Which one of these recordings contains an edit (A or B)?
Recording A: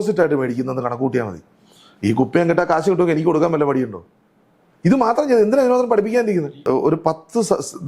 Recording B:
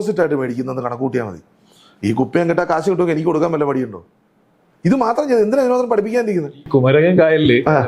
A